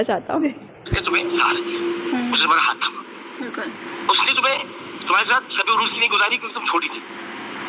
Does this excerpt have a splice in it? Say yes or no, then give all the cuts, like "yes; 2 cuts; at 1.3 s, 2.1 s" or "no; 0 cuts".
no; 0 cuts